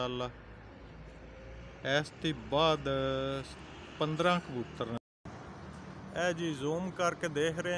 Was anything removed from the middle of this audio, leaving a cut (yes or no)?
yes